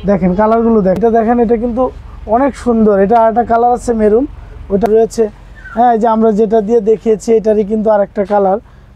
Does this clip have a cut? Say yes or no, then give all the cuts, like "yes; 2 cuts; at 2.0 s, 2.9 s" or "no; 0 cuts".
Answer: yes; 2 cuts; at 1.0 s, 4.7 s